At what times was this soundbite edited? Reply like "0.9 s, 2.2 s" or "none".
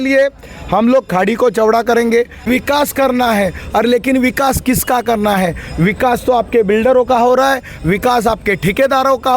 2.4 s